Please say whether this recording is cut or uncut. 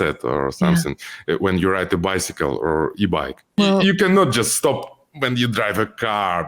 cut